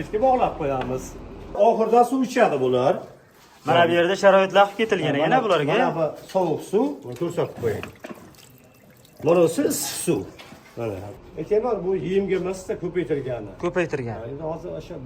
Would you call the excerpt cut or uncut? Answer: cut